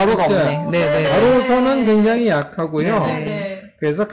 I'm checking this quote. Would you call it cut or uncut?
uncut